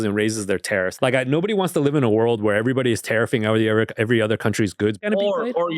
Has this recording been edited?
yes; 2 cuts; at 0.9 s, 5.0 s

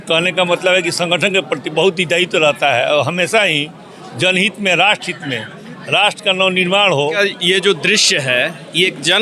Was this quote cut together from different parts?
yes; 1 cut; at 7.2 s

